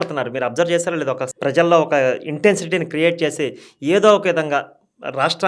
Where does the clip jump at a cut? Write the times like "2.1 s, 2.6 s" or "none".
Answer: 1.3 s